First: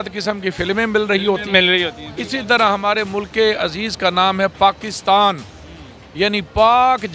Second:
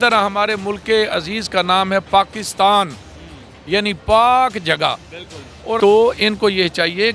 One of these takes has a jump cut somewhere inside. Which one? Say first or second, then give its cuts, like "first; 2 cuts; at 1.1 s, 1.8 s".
second; 1 cut; at 5.8 s